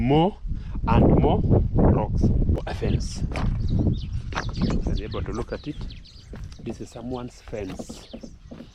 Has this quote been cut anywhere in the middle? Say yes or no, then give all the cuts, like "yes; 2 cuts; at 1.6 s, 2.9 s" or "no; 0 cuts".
yes; 1 cut; at 2.6 s